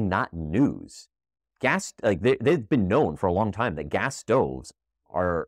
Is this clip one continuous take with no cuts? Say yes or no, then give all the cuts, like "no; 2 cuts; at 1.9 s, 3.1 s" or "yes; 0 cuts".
yes; 0 cuts